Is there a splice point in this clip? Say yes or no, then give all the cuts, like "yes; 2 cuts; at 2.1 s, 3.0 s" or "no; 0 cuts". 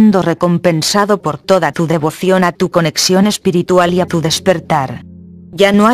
no; 0 cuts